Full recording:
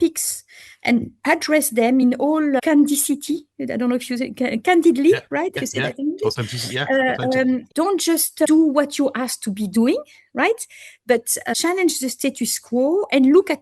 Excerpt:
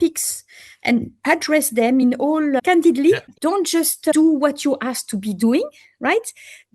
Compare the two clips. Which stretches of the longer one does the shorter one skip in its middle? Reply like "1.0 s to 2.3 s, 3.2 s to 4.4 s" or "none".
2.6 s to 4.6 s, 5.3 s to 7.7 s